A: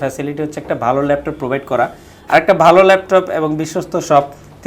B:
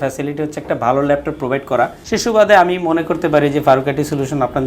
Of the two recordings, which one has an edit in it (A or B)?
B